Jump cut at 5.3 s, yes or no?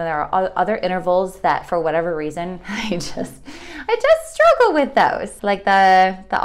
yes